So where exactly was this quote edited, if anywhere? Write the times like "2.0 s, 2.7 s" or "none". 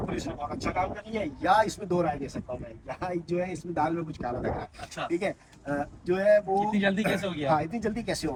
none